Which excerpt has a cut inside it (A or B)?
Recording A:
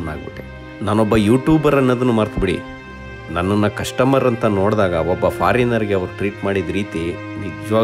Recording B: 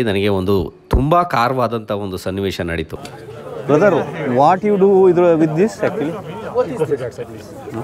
B